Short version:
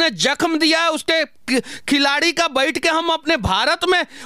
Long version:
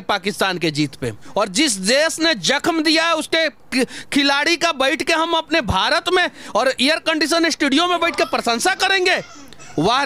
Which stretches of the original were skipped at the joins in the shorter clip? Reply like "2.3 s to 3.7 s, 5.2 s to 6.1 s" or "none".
none